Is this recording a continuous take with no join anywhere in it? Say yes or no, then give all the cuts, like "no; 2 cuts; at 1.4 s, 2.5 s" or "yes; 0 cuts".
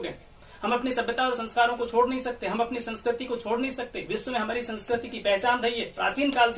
yes; 0 cuts